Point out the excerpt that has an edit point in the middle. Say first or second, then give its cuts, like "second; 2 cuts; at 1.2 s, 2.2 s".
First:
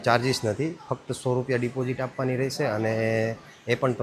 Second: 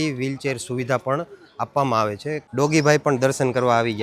second; 1 cut; at 2.5 s